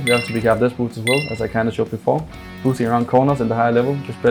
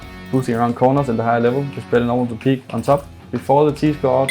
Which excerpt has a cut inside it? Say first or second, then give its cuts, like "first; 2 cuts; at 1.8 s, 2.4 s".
second; 1 cut; at 3.3 s